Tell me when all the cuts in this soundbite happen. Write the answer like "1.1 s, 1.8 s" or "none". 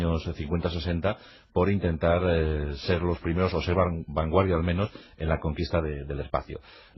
none